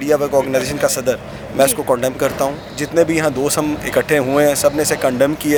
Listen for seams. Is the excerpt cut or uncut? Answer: uncut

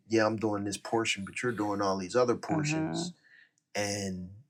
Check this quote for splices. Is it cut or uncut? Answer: uncut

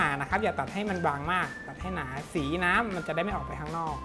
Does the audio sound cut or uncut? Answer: uncut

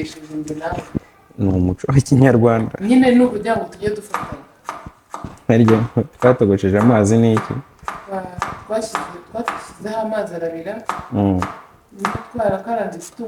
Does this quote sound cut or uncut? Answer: uncut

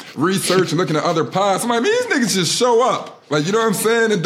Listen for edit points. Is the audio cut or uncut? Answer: uncut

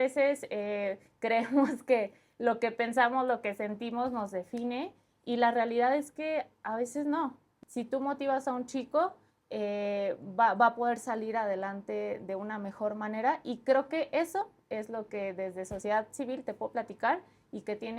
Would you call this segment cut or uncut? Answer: cut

